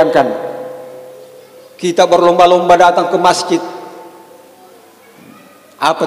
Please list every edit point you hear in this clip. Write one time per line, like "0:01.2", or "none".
none